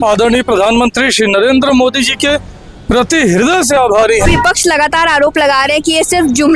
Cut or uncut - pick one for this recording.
cut